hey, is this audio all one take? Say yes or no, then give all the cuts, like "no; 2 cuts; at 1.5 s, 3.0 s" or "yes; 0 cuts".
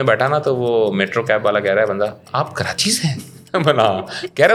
yes; 0 cuts